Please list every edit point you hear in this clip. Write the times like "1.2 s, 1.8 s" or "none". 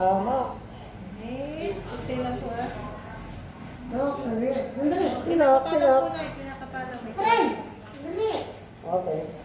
none